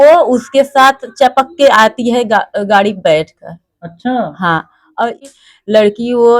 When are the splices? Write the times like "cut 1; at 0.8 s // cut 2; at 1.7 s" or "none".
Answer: cut 1; at 5.2 s